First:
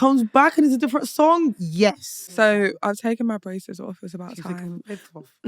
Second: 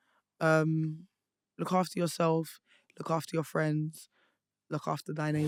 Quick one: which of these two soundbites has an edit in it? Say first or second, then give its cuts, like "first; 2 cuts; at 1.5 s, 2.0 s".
first; 1 cut; at 2.0 s